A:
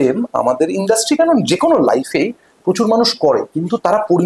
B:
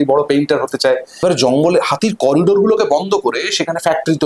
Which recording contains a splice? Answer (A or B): B